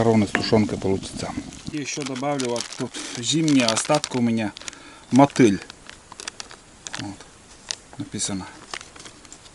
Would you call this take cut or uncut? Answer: cut